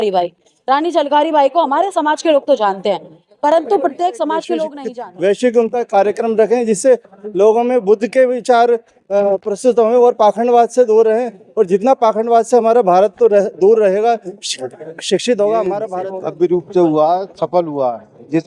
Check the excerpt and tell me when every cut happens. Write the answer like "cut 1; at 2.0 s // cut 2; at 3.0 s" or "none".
cut 1; at 4.8 s // cut 2; at 15.9 s